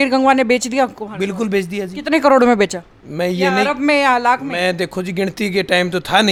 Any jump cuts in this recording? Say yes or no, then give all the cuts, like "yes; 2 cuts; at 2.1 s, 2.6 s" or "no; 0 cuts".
no; 0 cuts